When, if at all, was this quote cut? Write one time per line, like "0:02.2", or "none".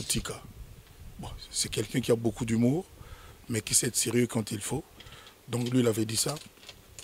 none